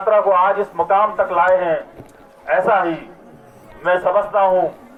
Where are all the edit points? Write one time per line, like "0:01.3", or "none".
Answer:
none